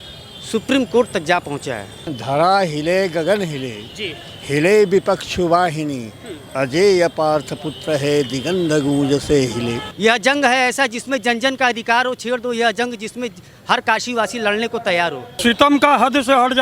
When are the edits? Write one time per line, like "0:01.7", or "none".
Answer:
0:02.2
0:09.8
0:15.3